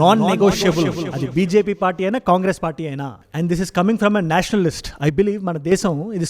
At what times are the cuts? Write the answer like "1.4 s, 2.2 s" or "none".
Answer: 3.2 s